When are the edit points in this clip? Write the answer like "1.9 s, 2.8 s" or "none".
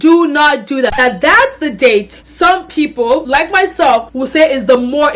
0.9 s